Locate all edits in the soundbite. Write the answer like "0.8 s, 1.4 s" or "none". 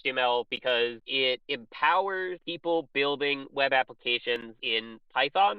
1.1 s, 2.4 s, 4.6 s